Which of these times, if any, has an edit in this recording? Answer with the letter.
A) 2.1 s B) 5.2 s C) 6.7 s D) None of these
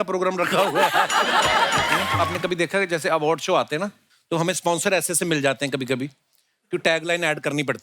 A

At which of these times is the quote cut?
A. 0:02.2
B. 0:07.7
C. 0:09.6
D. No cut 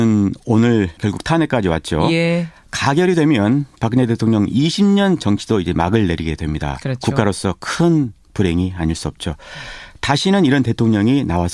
A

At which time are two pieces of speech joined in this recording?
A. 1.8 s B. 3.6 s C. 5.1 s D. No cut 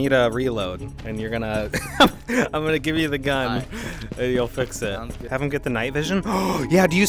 C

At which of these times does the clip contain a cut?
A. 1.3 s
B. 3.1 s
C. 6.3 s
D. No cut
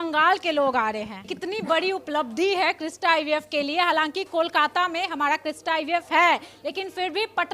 A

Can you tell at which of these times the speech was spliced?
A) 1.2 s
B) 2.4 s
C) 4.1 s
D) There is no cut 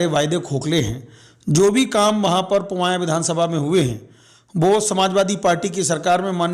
D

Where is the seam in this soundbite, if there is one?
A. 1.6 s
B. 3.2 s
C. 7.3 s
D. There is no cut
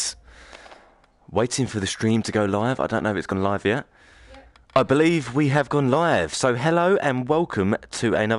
A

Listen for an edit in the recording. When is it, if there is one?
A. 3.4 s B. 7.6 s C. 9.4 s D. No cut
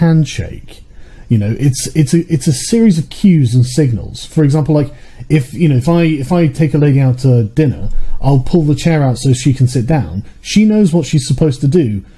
D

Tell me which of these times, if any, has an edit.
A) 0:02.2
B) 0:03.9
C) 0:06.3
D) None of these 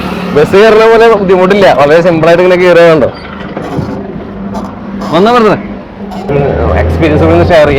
C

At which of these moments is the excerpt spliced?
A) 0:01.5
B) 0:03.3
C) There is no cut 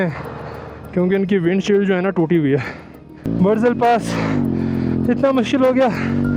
B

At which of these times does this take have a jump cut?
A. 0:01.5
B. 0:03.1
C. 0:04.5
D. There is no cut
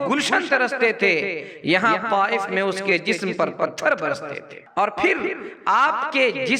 C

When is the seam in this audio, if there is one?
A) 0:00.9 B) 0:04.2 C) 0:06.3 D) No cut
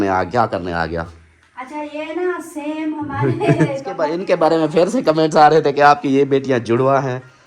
B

